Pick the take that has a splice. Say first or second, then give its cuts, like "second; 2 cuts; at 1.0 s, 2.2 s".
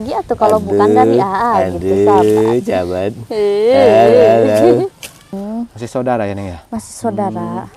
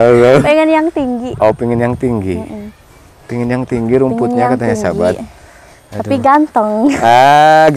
first; 1 cut; at 5.3 s